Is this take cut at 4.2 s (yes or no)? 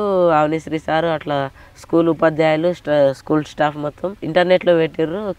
yes